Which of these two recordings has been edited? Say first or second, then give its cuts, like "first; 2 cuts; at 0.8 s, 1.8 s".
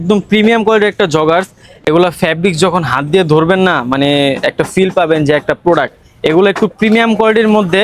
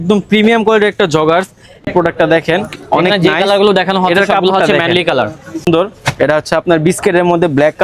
second; 2 cuts; at 1.9 s, 5.7 s